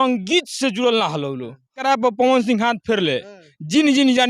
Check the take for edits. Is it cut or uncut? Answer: cut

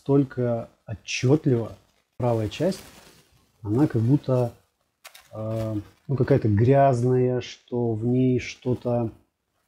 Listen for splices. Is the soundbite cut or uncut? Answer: cut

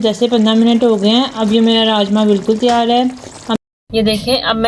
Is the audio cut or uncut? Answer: cut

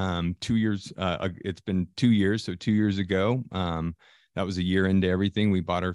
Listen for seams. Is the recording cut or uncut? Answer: uncut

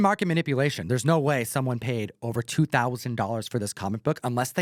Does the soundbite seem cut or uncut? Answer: uncut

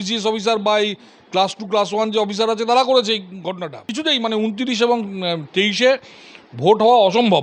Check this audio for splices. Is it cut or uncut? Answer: cut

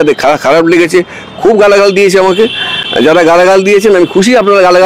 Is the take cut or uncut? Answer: uncut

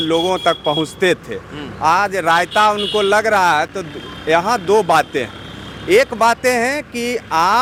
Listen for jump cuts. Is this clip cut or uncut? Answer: uncut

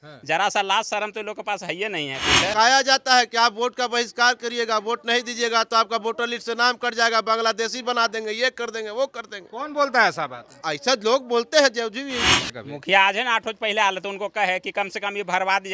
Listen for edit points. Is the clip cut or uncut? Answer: cut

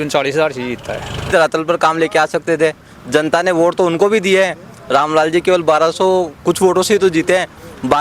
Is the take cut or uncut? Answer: cut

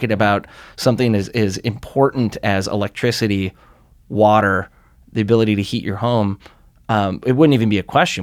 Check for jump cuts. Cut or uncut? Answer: uncut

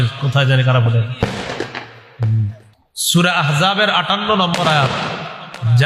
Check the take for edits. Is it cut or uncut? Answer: cut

